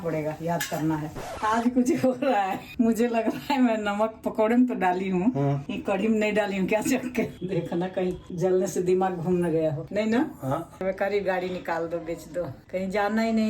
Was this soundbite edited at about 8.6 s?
no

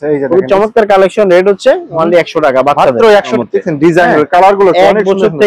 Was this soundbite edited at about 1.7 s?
no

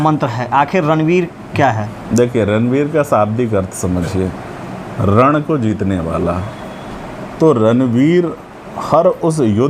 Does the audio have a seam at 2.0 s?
no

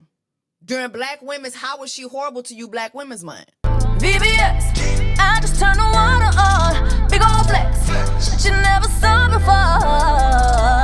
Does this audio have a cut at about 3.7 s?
yes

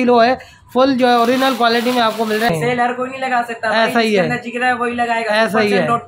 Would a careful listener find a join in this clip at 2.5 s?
yes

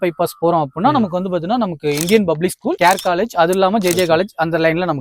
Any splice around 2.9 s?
no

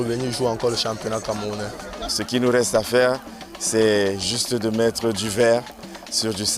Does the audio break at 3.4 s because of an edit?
no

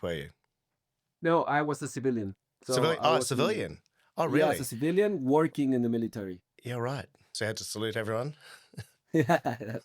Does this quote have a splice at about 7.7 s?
yes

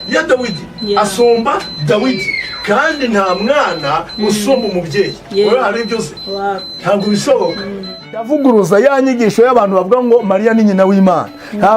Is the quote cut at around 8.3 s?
yes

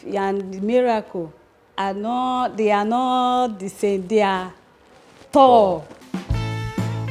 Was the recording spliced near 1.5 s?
no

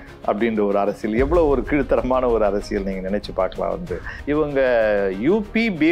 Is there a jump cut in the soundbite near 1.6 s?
no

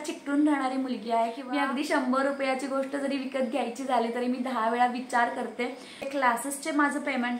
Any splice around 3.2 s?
no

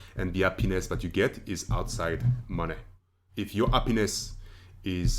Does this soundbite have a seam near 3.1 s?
yes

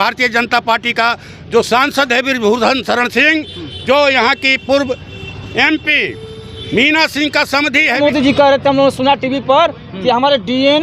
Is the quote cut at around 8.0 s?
yes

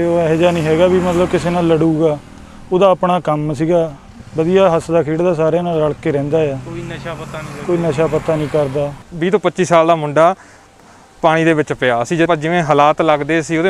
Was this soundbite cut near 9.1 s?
yes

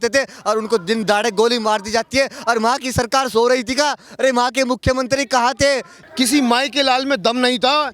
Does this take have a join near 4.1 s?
no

